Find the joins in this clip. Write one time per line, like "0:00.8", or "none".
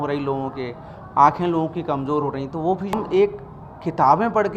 0:03.0